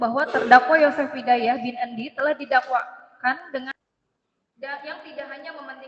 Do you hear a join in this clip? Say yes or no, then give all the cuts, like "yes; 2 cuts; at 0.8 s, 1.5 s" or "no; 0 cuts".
yes; 1 cut; at 3.7 s